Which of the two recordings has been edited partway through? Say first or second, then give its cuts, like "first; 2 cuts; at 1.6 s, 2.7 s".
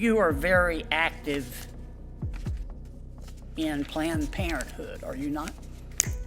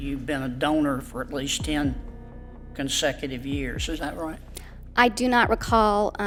first; 2 cuts; at 1.9 s, 3.3 s